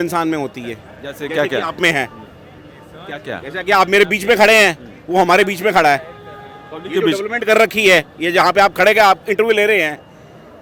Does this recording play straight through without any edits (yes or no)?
yes